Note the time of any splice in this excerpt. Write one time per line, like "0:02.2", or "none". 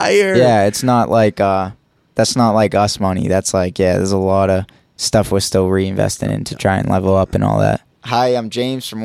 0:07.9